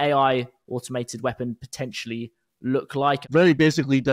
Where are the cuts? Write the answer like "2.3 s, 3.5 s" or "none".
3.2 s

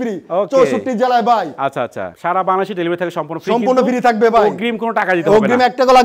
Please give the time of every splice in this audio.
none

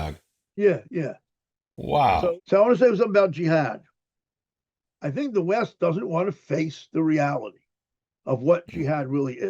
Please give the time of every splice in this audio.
2.3 s

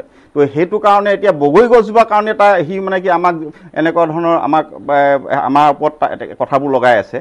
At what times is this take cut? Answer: none

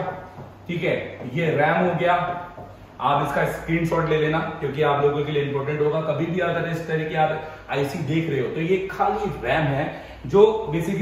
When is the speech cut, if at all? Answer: none

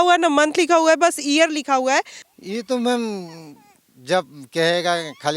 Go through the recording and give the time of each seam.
2.3 s

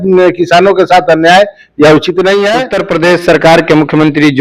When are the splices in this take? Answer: 2.8 s

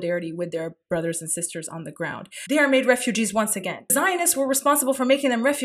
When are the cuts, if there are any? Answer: 2.3 s, 3.9 s

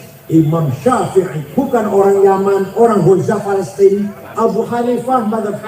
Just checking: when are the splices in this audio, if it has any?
1.4 s, 4.2 s

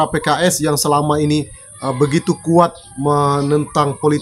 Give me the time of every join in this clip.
none

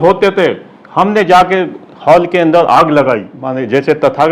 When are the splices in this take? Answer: 3.4 s

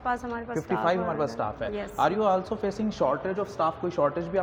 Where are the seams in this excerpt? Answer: none

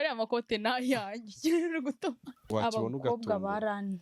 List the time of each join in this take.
2.4 s

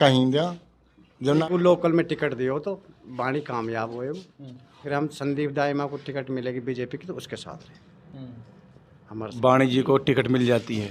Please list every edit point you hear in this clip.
1.4 s, 4.8 s, 9.3 s

